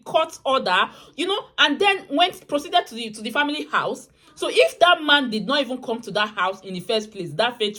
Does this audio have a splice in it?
no; 0 cuts

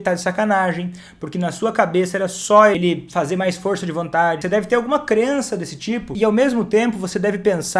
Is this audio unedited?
no; 3 cuts; at 2.8 s, 4.4 s, 6.1 s

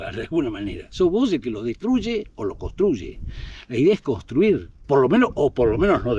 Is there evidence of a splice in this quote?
no; 0 cuts

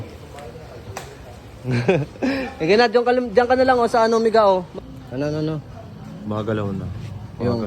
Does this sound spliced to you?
yes; 1 cut; at 4.9 s

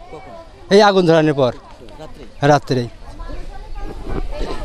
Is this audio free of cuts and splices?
yes; 0 cuts

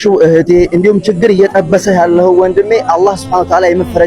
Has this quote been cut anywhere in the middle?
no; 0 cuts

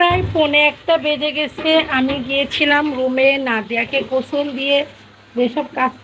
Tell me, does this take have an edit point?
no; 0 cuts

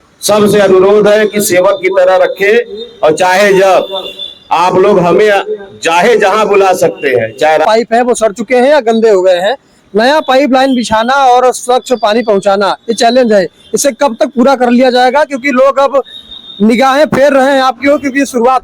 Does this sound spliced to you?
yes; 1 cut; at 7.6 s

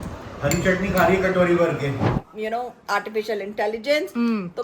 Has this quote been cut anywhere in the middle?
yes; 1 cut; at 2.0 s

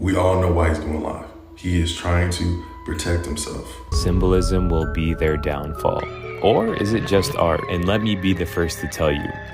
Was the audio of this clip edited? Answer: yes; 1 cut; at 3.8 s

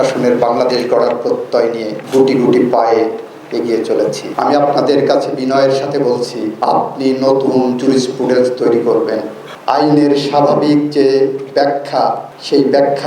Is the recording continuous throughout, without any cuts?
no; 2 cuts; at 4.3 s, 9.5 s

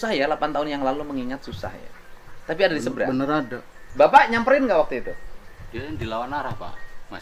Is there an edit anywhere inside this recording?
no; 0 cuts

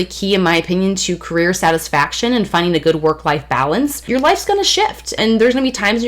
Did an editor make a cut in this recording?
yes; 2 cuts; at 4.1 s, 5.2 s

